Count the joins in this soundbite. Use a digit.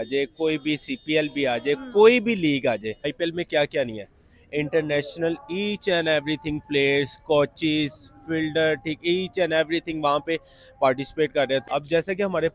2